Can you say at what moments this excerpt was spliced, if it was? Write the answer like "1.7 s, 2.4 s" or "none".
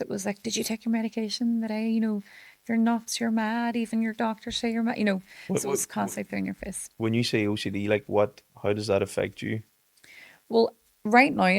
none